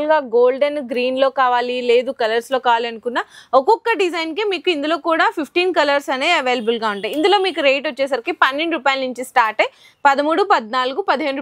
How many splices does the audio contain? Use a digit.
0